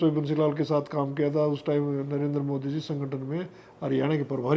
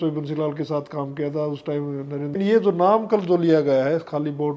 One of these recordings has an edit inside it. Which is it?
second; 1 cut; at 2.4 s

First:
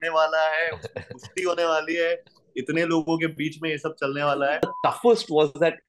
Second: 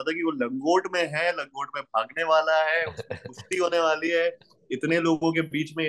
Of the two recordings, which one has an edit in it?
first; 1 cut; at 4.7 s

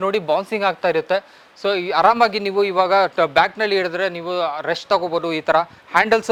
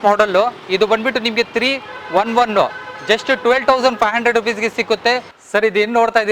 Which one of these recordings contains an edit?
second; 1 cut; at 5.3 s

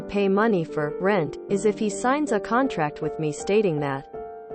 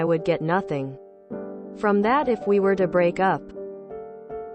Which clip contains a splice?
second; 1 cut; at 3.5 s

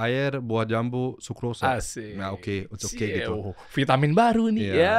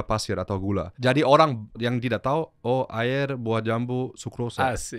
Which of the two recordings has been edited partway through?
second; 2 cuts; at 1.0 s, 1.8 s

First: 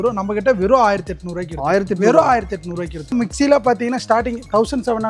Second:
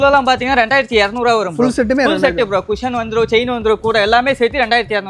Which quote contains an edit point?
first; 1 cut; at 3.1 s

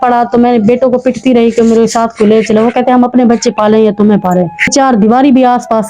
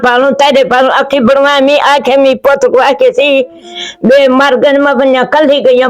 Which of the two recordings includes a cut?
first; 1 cut; at 4.7 s

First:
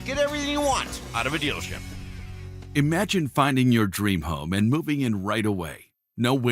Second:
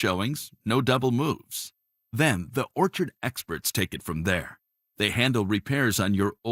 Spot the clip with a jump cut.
first; 1 cut; at 2.2 s

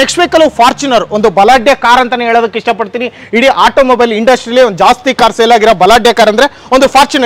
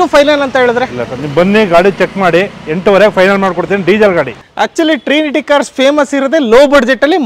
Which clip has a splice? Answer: second; 1 cut; at 4.4 s

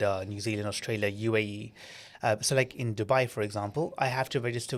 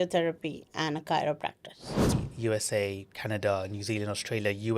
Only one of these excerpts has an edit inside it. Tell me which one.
second; 1 cut; at 2.1 s

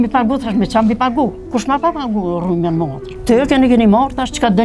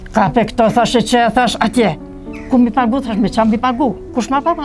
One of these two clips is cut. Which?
first; 1 cut; at 3.1 s

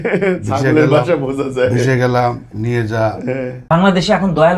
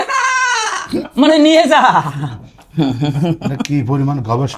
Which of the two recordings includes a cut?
first; 1 cut; at 3.5 s

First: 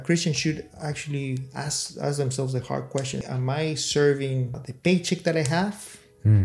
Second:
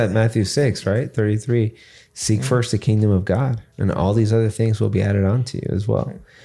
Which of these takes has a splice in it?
first; 2 cuts; at 3.3 s, 4.6 s

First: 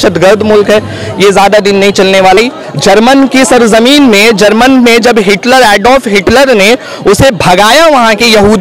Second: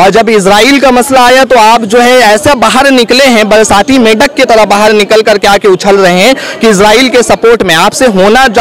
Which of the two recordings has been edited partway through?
first; 1 cut; at 2.4 s

